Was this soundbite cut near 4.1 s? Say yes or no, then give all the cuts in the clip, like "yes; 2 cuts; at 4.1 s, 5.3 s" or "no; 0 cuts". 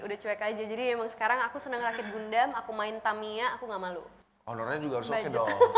yes; 1 cut; at 4.1 s